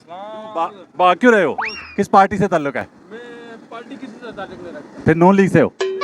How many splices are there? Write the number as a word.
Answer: one